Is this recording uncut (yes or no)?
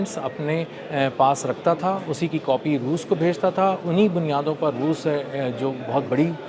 yes